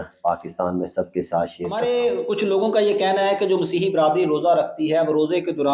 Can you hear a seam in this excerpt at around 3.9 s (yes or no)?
no